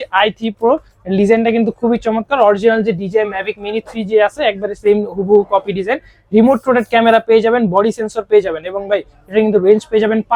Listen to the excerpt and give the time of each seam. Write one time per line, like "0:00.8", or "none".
none